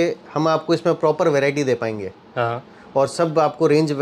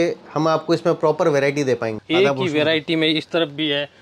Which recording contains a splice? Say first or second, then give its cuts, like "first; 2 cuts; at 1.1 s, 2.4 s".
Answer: second; 1 cut; at 2.0 s